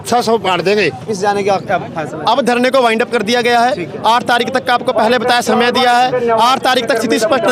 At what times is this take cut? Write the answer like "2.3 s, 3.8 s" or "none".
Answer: 1.1 s